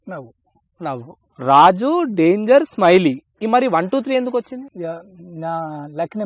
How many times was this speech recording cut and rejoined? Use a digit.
2